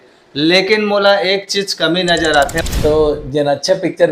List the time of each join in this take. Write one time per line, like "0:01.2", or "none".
0:02.6